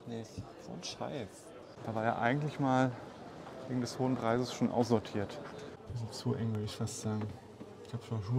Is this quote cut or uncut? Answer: cut